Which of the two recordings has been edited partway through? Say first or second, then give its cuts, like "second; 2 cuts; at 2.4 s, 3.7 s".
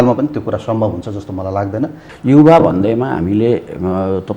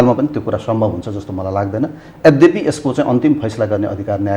first; 1 cut; at 2.0 s